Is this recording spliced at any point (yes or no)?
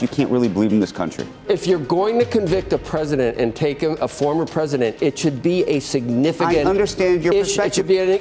yes